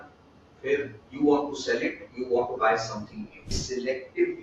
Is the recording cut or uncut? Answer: cut